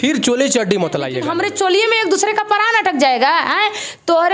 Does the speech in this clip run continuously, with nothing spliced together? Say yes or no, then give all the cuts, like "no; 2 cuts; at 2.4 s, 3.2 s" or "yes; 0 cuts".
no; 1 cut; at 1.2 s